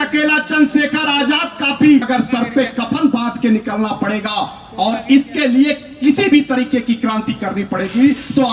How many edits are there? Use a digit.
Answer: 1